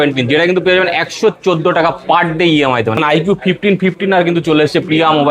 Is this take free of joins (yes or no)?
no